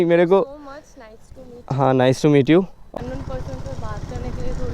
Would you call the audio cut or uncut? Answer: cut